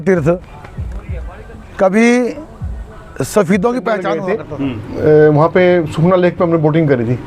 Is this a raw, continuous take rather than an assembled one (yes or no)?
no